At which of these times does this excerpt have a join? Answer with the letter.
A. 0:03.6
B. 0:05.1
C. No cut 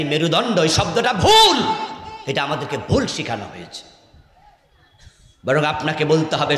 C